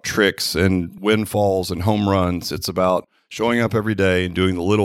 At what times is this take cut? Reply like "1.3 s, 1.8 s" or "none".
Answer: 0.9 s, 3.2 s